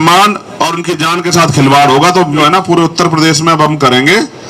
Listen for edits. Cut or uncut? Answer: cut